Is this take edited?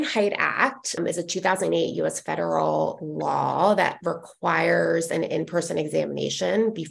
yes; 1 cut; at 1.0 s

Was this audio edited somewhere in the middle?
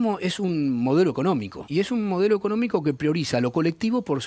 yes; 1 cut; at 1.6 s

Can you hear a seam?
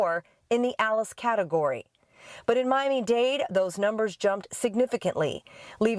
yes; 1 cut; at 4.9 s

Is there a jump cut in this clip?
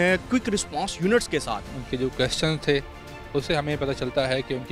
yes; 1 cut; at 1.8 s

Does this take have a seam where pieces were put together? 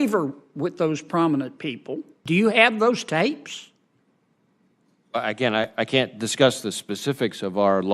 yes; 1 cut; at 2.1 s

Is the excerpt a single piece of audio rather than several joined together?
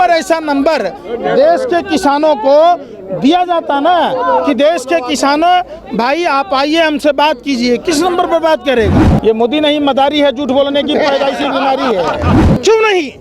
no; 2 cuts; at 9.0 s, 12.3 s

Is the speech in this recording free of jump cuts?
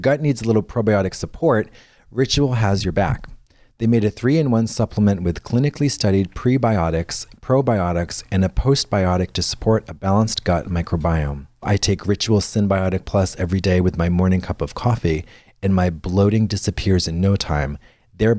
no; 1 cut; at 11.6 s

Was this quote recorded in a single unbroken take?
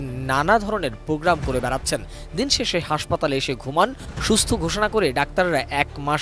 yes; 0 cuts

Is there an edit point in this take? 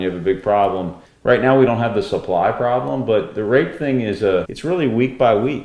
no; 0 cuts

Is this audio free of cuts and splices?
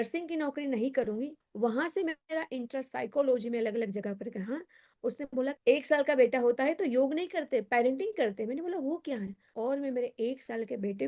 no; 3 cuts; at 1.4 s, 4.9 s, 9.5 s

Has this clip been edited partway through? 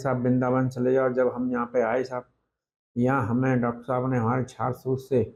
no; 0 cuts

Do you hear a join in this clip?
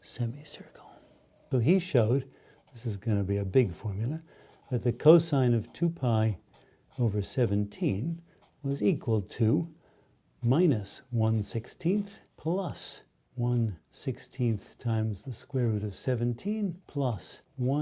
yes; 1 cut; at 1.3 s

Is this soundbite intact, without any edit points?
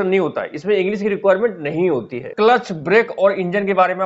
no; 1 cut; at 2.3 s

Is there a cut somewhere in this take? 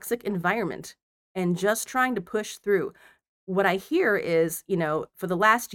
no; 0 cuts

